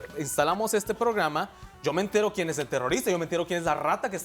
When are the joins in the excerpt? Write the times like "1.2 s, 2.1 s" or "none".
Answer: none